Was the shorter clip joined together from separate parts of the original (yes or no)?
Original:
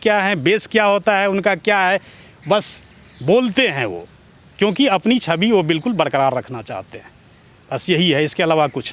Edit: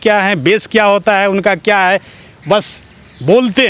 no